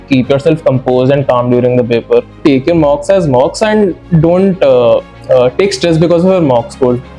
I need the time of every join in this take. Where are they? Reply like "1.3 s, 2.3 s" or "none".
2.4 s